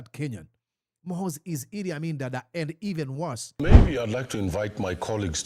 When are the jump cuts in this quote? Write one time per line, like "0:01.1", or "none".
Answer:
0:03.6